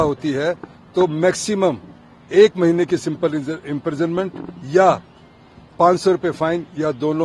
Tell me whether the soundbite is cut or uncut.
uncut